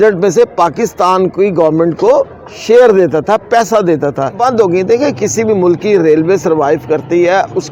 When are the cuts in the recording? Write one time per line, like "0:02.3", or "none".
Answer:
0:04.4